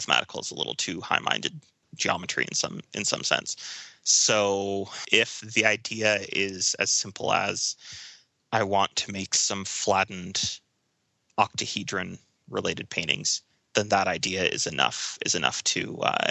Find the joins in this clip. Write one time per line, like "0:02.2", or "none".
0:01.9